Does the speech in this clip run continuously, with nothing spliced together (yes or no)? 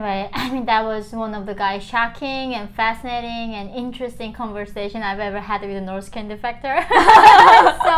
yes